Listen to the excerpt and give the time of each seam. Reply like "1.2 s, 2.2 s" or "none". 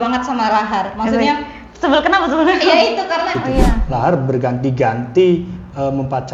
3.4 s